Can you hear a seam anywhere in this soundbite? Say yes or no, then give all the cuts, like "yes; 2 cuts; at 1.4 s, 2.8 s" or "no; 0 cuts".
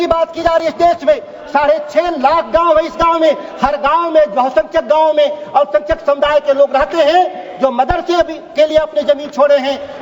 no; 0 cuts